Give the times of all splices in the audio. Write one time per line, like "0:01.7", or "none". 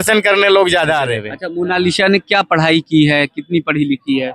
0:01.4